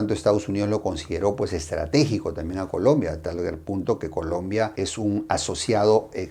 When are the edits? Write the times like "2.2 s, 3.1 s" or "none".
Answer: none

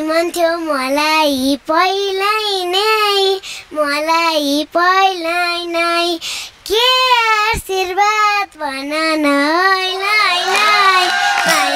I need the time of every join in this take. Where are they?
none

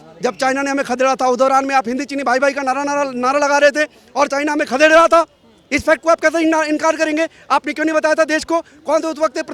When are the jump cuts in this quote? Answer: none

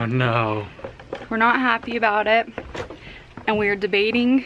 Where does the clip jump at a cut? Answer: none

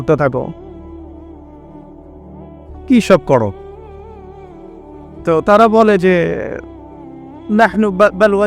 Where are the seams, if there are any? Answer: 3.5 s, 5.1 s

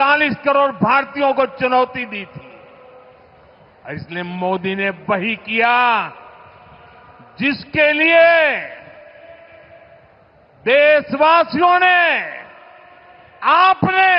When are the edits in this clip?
none

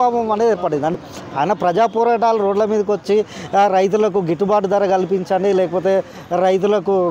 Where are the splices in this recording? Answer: 0.9 s

